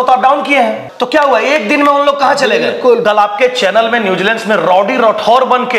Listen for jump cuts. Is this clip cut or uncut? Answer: cut